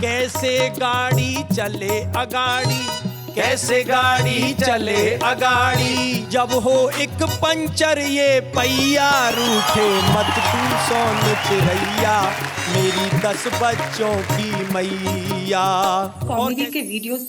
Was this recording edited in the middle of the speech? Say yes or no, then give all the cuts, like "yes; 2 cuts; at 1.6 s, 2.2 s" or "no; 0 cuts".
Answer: yes; 1 cut; at 16.3 s